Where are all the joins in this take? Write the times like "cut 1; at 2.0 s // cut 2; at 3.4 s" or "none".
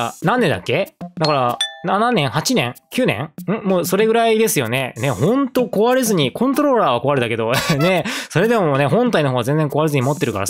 none